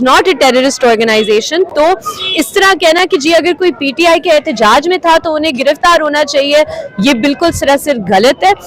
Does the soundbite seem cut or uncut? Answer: uncut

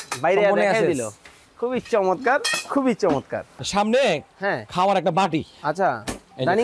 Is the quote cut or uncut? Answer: cut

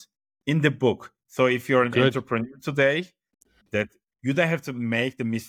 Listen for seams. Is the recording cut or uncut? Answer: uncut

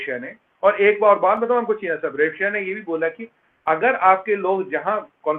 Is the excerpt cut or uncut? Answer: uncut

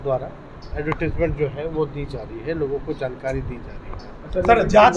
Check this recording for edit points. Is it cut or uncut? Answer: uncut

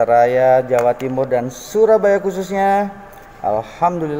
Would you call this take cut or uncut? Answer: uncut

